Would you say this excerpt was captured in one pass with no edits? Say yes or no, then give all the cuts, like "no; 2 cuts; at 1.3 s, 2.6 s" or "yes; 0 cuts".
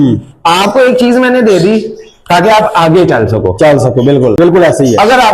no; 1 cut; at 4.4 s